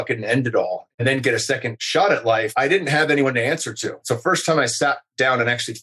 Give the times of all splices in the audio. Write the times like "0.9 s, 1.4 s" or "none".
0.8 s, 1.8 s, 2.5 s, 4.1 s